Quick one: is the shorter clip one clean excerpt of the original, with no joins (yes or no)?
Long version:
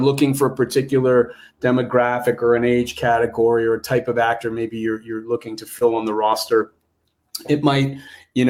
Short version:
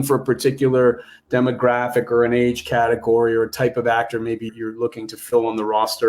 no